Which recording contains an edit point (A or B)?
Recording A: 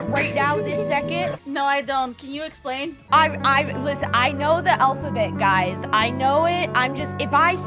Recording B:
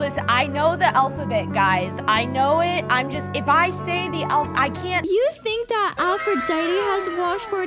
B